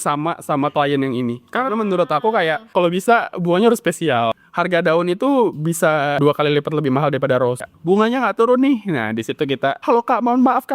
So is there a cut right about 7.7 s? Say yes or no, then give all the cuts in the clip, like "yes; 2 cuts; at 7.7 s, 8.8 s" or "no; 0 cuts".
yes; 5 cuts; at 2.6 s, 4.4 s, 6.2 s, 7.7 s, 9.8 s